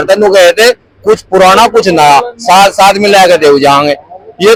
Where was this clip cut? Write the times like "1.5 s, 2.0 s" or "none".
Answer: none